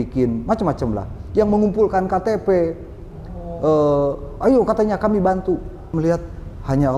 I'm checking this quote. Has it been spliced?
yes; 1 cut; at 5.8 s

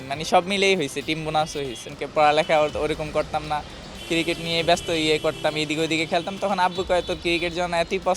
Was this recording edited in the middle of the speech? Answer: yes; 1 cut; at 1.9 s

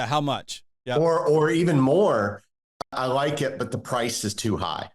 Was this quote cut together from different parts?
yes; 1 cut; at 2.8 s

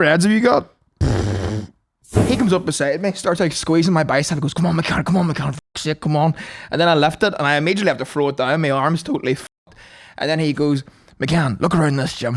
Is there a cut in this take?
yes; 1 cut; at 2.1 s

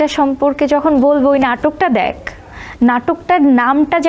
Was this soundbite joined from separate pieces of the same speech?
no; 0 cuts

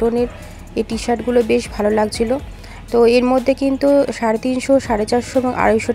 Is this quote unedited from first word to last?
yes; 0 cuts

